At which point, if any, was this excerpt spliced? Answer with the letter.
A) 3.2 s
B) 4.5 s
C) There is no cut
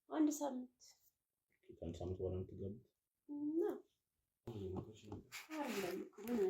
B